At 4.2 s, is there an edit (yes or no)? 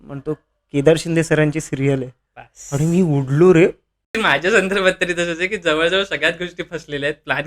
yes